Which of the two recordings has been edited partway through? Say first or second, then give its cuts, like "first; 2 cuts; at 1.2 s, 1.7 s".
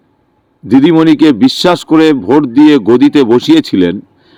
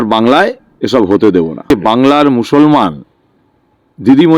second; 1 cut; at 1.7 s